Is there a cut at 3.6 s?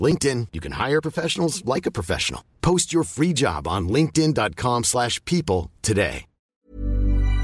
no; 1 cut; at 6.6 s

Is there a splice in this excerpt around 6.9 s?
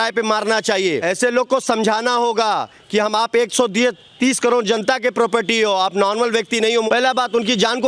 yes; 1 cut; at 6.9 s

